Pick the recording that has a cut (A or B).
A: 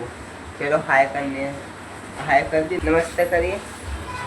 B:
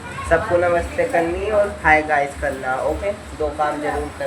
A